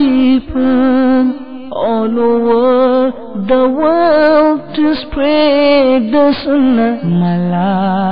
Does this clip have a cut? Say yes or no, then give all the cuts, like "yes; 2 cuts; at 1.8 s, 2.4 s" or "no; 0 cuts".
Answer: no; 0 cuts